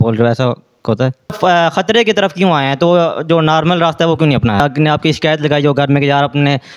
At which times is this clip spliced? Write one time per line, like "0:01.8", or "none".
0:01.3
0:04.6